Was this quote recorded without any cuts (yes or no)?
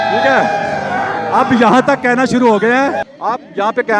no